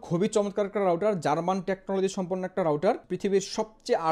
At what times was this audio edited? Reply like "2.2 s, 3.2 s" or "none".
3.1 s